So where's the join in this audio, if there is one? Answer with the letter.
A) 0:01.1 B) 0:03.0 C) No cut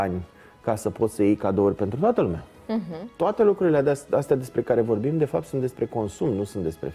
B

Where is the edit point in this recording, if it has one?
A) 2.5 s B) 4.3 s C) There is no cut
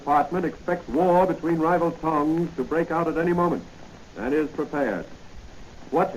A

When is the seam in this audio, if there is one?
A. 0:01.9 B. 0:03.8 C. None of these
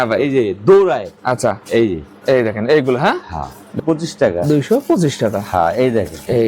B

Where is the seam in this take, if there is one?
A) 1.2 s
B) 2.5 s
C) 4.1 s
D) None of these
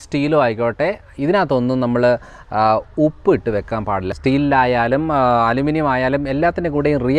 C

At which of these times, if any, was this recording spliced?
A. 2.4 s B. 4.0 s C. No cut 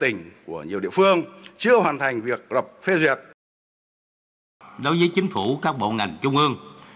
B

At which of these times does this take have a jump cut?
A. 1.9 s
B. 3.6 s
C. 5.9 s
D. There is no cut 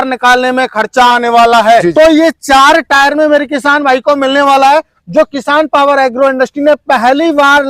A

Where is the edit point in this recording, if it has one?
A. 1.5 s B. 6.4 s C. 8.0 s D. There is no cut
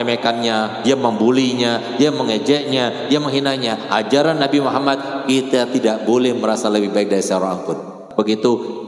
C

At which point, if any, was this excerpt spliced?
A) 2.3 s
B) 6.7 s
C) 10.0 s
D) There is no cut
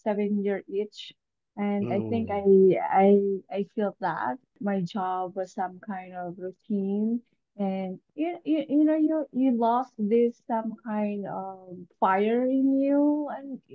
D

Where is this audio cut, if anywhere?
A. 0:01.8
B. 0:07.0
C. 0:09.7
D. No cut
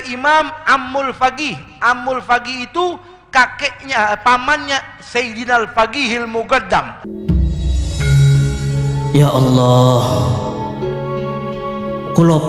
B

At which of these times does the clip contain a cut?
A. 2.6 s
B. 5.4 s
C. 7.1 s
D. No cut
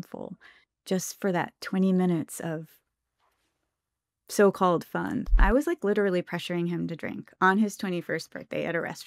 B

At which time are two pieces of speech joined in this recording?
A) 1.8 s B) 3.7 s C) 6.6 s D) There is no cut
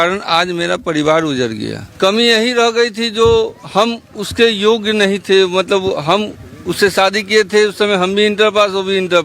A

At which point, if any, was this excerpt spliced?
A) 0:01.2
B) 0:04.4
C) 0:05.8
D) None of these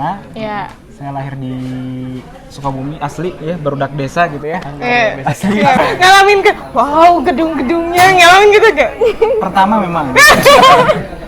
C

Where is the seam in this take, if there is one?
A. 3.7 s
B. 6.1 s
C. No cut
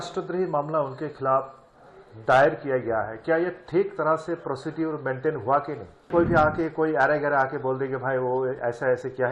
B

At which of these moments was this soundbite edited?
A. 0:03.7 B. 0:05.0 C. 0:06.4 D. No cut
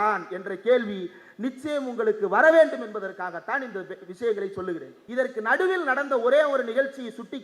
B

